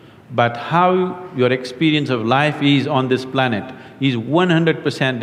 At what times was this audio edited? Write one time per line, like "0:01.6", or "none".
none

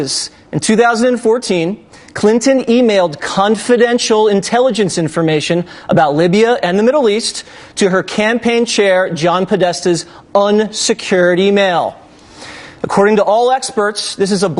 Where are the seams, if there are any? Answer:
none

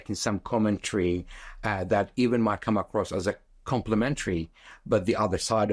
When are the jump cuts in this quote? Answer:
none

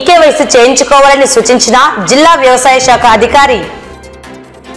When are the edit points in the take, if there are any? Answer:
none

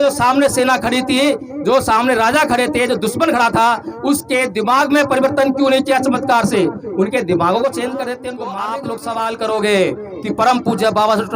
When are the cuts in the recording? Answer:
0:08.6

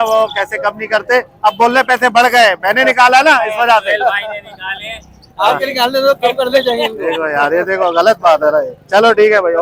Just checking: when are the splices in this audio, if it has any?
none

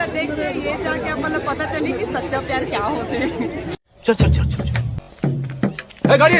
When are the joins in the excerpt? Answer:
0:04.9

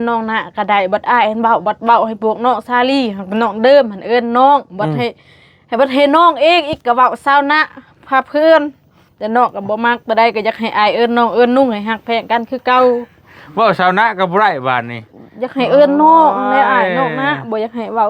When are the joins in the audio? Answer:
none

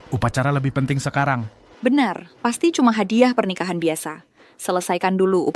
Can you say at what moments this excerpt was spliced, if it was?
none

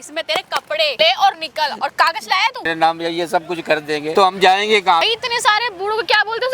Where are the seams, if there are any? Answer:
0:00.9
0:02.7
0:04.1
0:05.0

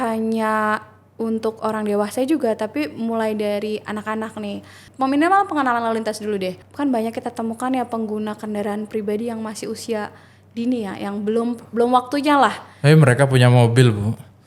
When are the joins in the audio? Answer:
0:04.9
0:06.6

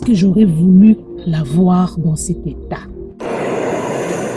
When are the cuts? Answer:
0:03.1

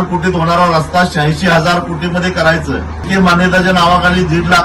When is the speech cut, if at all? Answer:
0:03.0

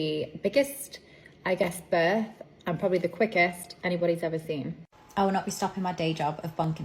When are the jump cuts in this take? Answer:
0:04.8

